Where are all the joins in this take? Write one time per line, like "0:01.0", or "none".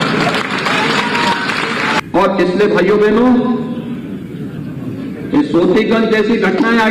0:02.0